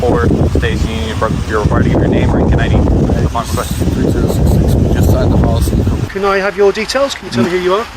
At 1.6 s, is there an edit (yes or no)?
no